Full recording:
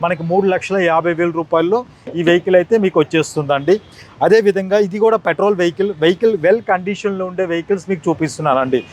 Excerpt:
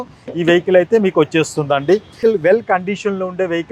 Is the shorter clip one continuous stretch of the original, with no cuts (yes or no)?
no